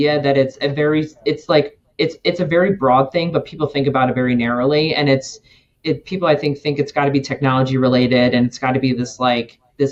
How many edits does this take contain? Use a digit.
0